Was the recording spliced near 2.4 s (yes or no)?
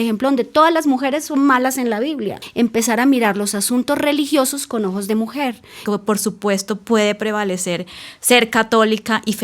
yes